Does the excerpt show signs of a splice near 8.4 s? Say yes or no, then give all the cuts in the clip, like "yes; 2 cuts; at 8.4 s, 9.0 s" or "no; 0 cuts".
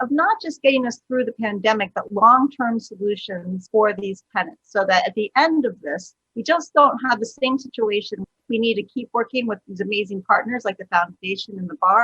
yes; 1 cut; at 8.4 s